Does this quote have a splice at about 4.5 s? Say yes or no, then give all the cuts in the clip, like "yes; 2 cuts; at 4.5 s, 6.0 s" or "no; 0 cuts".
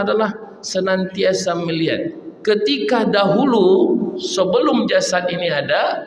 no; 1 cut; at 2.2 s